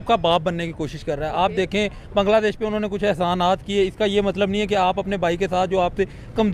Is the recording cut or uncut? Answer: uncut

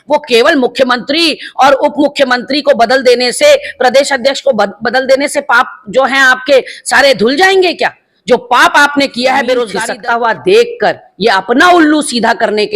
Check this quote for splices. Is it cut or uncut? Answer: cut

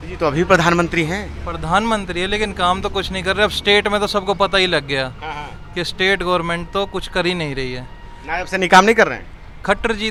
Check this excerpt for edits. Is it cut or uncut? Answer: uncut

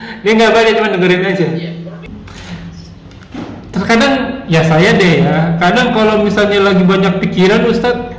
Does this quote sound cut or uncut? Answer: cut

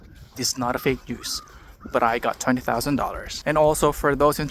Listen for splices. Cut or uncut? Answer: cut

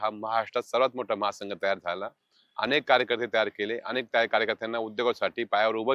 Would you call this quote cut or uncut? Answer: uncut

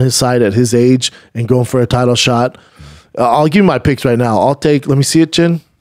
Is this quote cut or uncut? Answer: cut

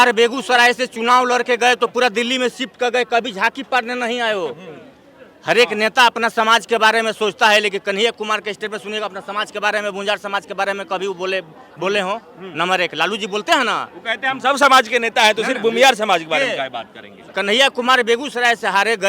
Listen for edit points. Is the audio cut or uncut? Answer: uncut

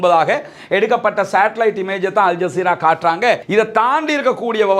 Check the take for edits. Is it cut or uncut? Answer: cut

